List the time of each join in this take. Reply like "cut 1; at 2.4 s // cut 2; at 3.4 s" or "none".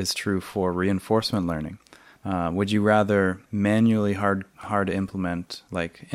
cut 1; at 2.2 s // cut 2; at 3.4 s // cut 3; at 4.6 s